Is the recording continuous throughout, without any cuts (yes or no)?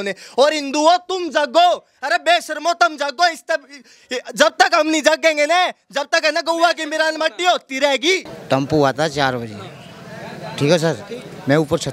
no